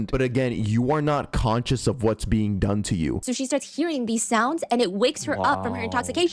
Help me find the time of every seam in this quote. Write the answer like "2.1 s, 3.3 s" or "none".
3.2 s